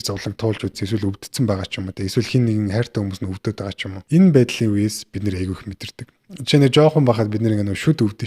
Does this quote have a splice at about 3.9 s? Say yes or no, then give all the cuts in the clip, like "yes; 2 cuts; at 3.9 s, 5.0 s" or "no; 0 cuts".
yes; 1 cut; at 3.9 s